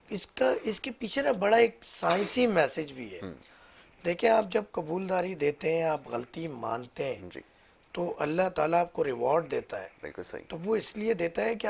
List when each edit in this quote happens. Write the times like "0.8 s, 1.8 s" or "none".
none

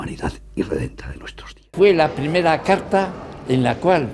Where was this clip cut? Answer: 1.6 s

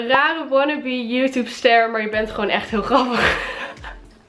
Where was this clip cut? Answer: none

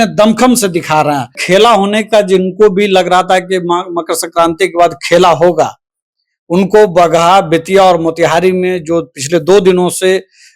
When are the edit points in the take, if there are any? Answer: 1.4 s

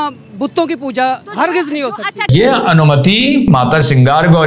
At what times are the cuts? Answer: 2.3 s, 3.5 s

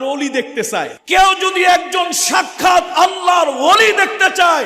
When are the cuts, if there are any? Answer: 1.0 s

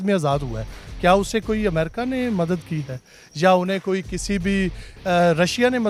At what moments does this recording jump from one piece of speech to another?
none

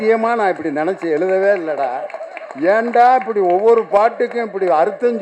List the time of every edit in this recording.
none

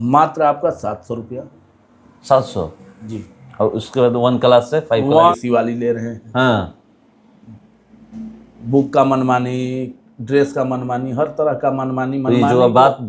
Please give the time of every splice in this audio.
5.3 s

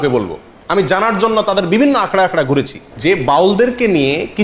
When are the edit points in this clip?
2.8 s

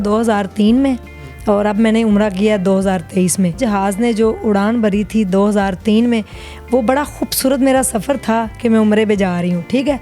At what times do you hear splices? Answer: 3.6 s

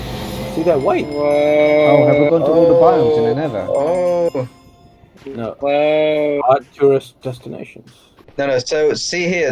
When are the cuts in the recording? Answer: 8.2 s

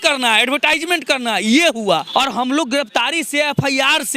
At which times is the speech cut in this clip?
2.1 s

